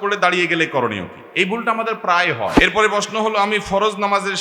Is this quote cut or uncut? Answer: cut